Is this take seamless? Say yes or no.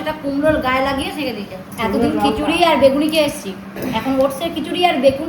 yes